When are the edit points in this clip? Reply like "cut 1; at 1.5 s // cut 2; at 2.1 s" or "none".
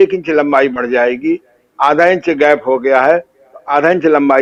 none